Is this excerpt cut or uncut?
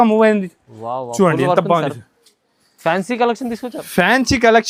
uncut